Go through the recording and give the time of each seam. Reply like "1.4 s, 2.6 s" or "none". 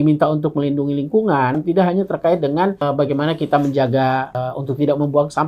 1.6 s, 2.8 s, 4.4 s